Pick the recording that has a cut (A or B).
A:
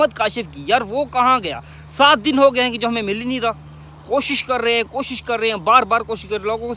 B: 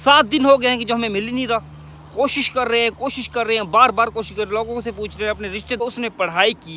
B